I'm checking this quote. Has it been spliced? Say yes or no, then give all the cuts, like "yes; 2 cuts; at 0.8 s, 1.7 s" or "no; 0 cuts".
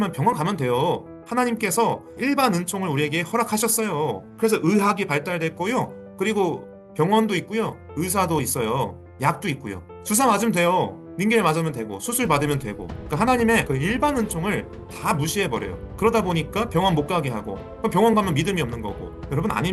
no; 0 cuts